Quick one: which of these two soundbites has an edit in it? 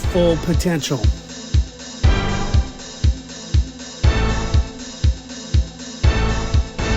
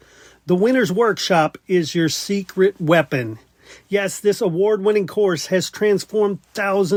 first; 1 cut; at 1.3 s

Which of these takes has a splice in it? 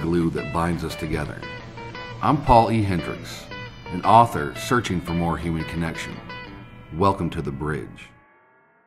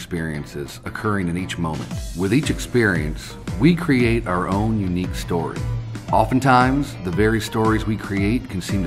first; 1 cut; at 7.9 s

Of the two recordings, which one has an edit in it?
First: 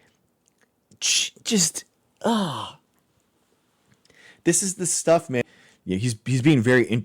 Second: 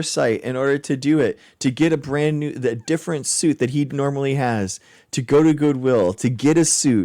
first; 1 cut; at 5.4 s

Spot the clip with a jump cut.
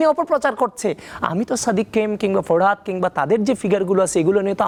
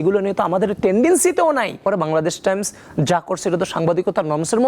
second; 1 cut; at 1.8 s

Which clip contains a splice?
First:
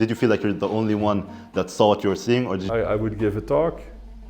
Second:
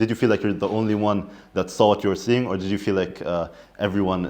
first; 1 cut; at 2.6 s

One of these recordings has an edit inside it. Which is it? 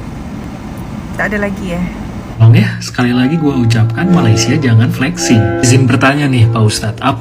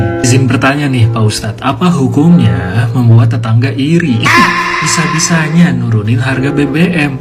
first; 1 cut; at 2.4 s

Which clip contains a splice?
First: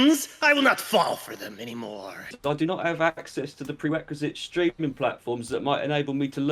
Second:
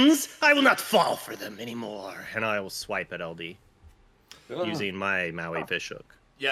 first; 1 cut; at 2.3 s

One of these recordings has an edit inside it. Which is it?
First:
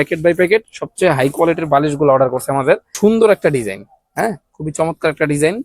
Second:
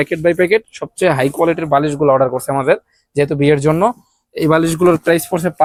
first; 1 cut; at 2.9 s

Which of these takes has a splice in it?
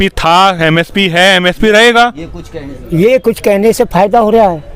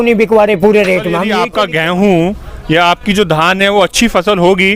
second; 1 cut; at 1.4 s

